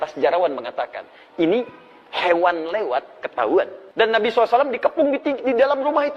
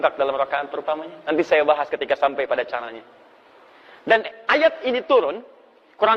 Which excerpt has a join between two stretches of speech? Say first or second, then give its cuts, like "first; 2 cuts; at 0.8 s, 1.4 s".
first; 1 cut; at 3.8 s